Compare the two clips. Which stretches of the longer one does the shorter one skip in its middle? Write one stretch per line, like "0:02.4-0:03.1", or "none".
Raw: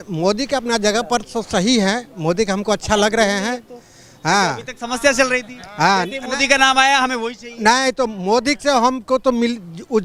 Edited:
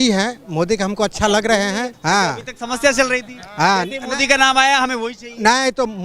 0:03.6-0:04.1